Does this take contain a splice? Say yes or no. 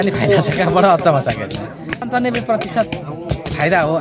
yes